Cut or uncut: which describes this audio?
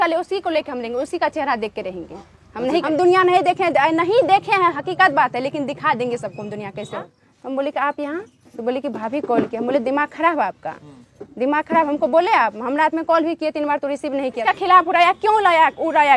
cut